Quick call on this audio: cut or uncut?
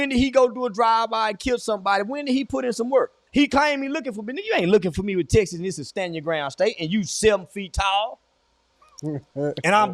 cut